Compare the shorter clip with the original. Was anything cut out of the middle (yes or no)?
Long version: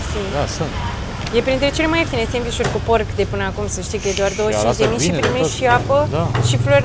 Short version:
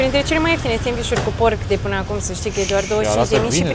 no